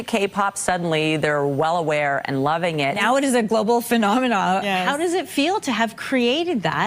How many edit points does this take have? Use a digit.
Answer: 1